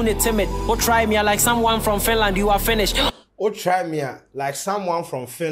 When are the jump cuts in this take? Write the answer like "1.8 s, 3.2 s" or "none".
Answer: 3.2 s